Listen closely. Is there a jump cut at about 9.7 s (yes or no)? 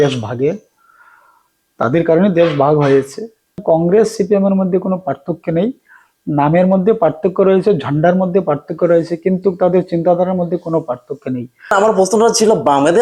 no